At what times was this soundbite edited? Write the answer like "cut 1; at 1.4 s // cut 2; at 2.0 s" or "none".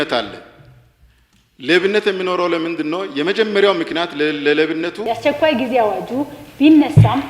cut 1; at 5.0 s